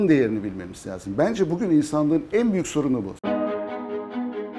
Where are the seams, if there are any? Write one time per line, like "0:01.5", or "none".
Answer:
none